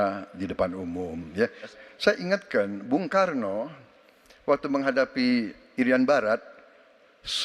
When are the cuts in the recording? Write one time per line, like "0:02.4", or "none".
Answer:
0:01.8